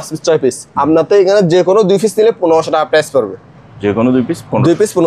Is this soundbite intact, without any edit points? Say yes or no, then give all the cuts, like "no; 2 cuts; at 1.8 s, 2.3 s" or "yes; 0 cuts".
yes; 0 cuts